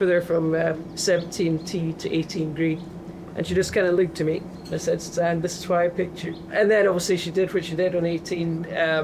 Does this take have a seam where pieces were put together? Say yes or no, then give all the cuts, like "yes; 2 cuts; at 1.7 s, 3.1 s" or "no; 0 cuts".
no; 0 cuts